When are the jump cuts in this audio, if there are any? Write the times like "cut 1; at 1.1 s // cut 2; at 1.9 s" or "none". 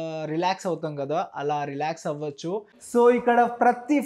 cut 1; at 2.8 s